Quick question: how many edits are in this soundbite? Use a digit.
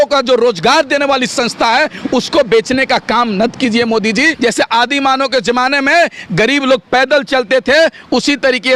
1